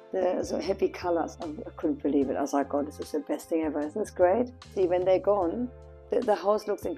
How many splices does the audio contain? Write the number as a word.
two